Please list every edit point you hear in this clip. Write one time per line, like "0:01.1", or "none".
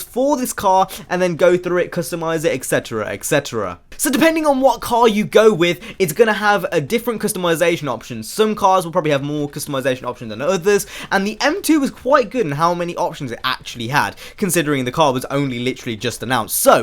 0:08.6